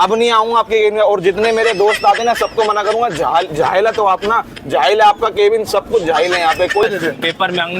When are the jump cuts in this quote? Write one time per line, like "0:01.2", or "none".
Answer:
0:06.8